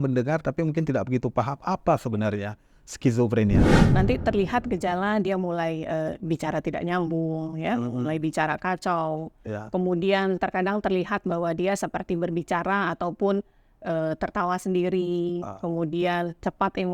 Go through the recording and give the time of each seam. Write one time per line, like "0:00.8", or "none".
0:03.7